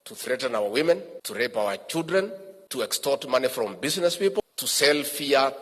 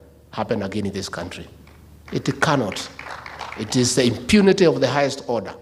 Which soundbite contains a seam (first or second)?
first